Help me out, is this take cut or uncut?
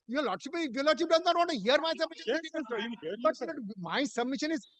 uncut